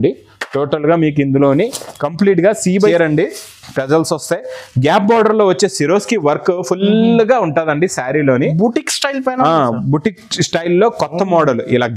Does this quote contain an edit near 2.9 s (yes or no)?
yes